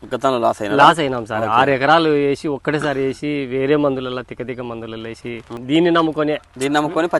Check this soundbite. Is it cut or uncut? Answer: cut